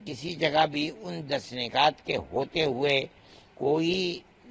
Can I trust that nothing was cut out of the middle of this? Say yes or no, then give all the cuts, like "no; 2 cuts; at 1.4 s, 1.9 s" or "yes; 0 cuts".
yes; 0 cuts